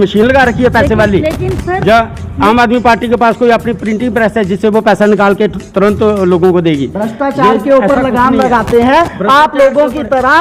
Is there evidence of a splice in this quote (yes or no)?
no